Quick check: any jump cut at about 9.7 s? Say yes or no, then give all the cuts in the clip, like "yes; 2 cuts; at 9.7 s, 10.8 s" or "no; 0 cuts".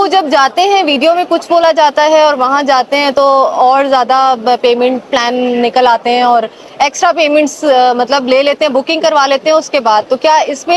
no; 0 cuts